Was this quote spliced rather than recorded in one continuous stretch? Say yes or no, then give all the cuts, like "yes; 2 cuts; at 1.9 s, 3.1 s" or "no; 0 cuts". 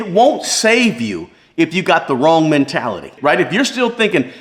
no; 0 cuts